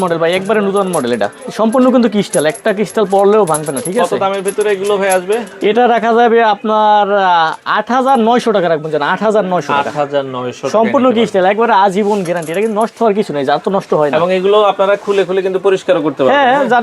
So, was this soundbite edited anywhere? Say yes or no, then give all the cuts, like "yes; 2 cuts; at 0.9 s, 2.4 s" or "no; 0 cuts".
no; 0 cuts